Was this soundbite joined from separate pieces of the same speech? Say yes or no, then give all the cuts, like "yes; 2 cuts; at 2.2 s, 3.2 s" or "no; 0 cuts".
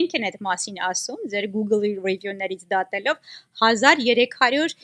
no; 0 cuts